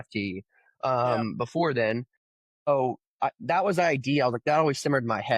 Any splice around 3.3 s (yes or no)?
no